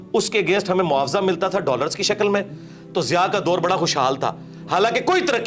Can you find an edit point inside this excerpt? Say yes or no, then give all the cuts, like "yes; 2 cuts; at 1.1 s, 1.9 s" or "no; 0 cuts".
no; 0 cuts